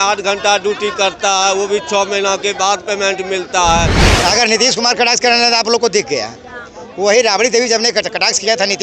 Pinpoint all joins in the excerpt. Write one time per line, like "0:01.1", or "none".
0:04.1